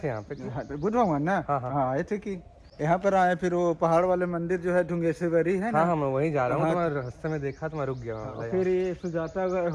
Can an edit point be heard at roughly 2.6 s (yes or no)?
no